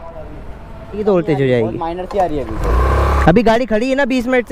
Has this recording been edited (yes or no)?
yes